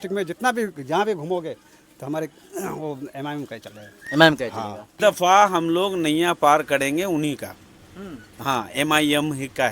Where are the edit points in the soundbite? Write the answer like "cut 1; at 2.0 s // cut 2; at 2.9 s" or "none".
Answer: cut 1; at 4.9 s